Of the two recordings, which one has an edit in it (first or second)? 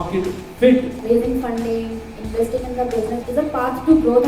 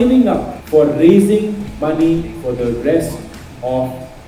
first